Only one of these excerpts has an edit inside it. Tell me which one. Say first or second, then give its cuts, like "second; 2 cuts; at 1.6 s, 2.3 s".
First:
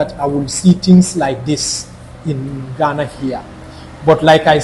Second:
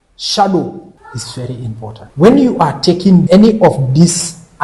second; 3 cuts; at 1.0 s, 2.0 s, 3.3 s